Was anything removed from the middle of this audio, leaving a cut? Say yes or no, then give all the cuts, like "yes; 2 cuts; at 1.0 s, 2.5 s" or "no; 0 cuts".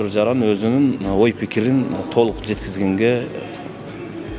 no; 0 cuts